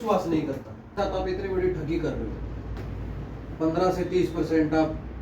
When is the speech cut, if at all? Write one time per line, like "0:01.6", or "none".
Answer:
0:01.0